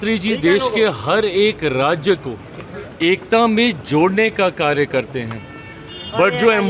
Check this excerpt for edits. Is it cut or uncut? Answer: uncut